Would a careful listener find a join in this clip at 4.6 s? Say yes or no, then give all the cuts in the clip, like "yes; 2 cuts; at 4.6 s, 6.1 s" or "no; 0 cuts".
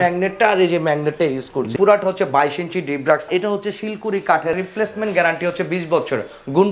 yes; 3 cuts; at 1.7 s, 3.3 s, 4.6 s